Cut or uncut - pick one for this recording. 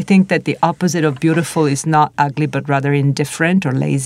uncut